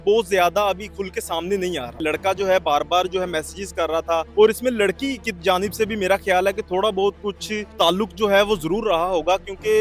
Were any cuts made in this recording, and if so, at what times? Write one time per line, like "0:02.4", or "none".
0:02.0
0:04.3
0:07.7